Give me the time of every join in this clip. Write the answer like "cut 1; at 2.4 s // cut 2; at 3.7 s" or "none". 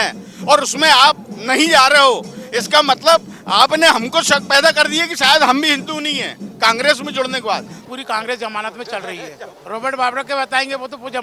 cut 1; at 7.9 s // cut 2; at 9.5 s